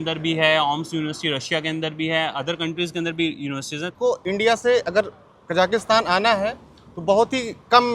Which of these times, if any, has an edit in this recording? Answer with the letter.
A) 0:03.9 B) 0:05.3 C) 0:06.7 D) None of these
A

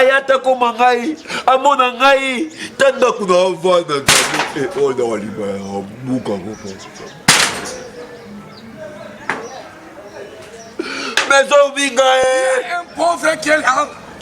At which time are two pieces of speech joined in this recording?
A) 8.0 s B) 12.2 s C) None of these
B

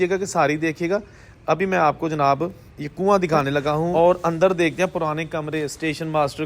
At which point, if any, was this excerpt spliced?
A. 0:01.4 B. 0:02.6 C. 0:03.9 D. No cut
C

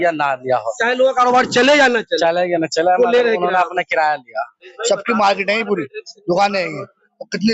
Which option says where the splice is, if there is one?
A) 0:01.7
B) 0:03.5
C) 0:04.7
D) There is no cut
C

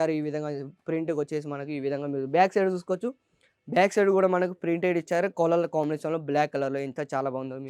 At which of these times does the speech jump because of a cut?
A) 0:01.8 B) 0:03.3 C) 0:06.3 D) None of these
D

